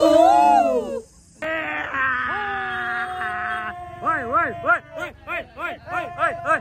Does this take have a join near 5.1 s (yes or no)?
no